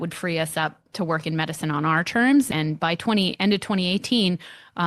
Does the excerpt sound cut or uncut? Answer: cut